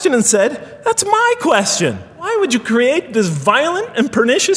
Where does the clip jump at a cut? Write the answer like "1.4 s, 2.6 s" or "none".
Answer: 2.3 s